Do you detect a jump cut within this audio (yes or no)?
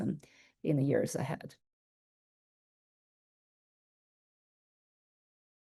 no